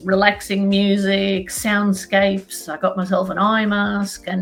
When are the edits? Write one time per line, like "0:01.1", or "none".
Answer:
none